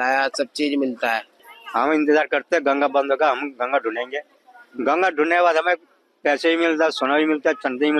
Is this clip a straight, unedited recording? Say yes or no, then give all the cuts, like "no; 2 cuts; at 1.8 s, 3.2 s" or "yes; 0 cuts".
no; 1 cut; at 1.3 s